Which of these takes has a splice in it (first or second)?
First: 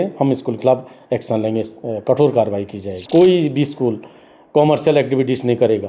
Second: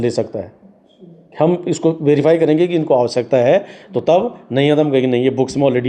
first